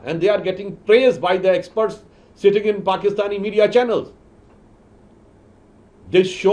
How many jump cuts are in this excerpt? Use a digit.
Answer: 0